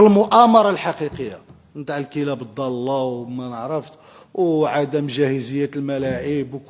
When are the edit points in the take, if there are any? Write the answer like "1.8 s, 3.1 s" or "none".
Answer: none